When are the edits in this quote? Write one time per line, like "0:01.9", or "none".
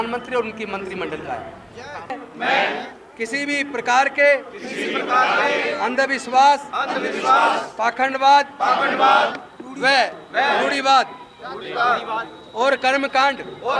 0:02.1